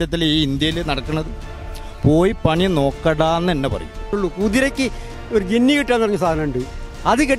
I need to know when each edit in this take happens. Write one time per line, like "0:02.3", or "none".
0:04.1